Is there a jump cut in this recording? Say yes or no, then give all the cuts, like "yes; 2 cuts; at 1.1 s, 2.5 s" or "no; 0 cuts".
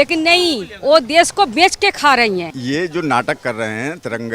yes; 1 cut; at 2.5 s